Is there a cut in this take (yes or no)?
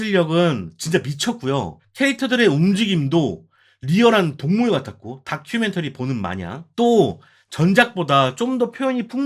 yes